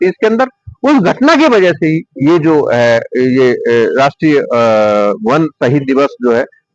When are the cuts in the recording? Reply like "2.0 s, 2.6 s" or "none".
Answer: none